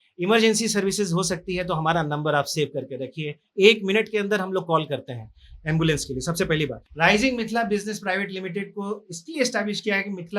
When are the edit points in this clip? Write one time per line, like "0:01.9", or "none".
0:06.8